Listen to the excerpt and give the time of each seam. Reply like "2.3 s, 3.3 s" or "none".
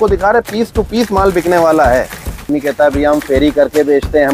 2.5 s